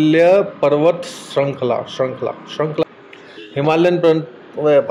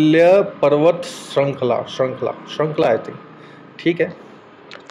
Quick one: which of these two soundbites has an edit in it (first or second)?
first